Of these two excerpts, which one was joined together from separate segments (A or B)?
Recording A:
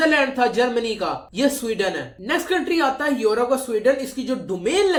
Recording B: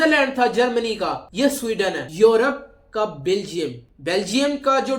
B